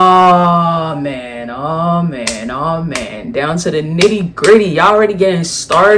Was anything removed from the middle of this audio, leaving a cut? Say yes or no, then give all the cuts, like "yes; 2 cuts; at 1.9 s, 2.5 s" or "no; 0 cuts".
no; 0 cuts